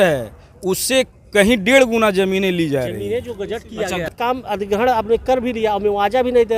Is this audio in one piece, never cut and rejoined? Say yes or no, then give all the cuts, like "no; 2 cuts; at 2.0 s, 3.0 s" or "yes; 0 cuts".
no; 1 cut; at 4.1 s